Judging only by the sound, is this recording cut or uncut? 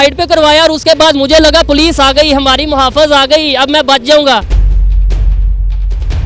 cut